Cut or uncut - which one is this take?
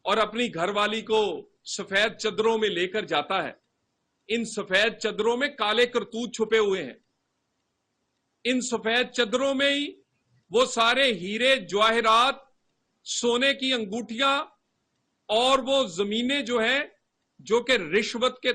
uncut